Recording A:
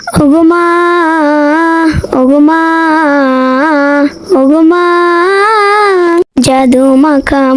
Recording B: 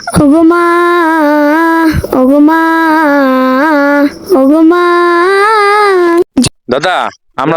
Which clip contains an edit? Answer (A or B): B